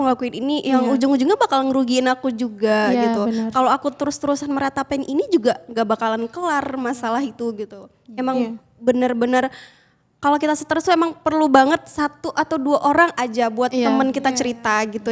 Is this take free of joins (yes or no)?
yes